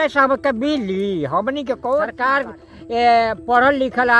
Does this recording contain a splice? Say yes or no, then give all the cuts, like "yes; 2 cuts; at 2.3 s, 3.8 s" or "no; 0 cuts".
yes; 1 cut; at 2.2 s